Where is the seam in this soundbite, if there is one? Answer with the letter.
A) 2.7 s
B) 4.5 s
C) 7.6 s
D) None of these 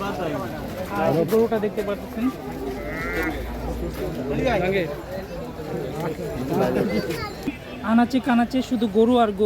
C